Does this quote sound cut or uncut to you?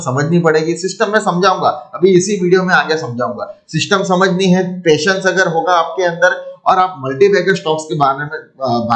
uncut